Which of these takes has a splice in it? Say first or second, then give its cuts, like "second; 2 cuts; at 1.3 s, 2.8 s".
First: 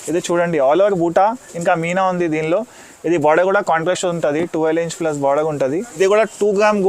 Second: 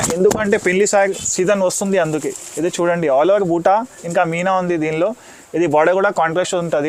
first; 1 cut; at 6.0 s